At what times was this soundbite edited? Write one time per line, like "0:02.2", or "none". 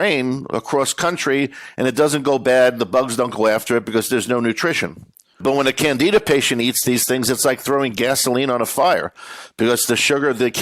0:05.4